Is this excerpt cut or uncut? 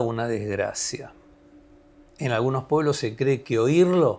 uncut